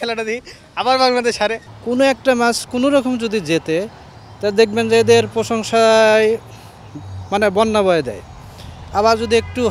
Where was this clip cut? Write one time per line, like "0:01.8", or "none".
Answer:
0:01.6